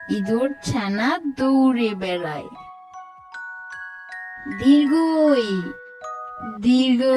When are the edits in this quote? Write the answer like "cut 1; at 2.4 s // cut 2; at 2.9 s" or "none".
cut 1; at 2.7 s // cut 2; at 4.2 s